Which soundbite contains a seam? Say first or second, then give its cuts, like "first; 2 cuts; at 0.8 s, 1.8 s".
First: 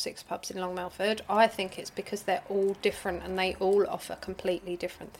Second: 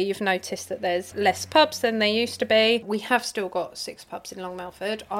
second; 2 cuts; at 1.1 s, 2.9 s